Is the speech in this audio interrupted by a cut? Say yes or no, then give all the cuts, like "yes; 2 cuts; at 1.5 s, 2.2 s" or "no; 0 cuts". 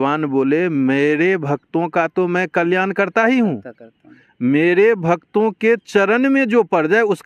no; 0 cuts